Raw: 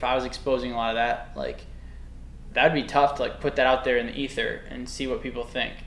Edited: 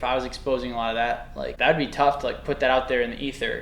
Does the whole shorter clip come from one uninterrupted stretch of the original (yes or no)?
no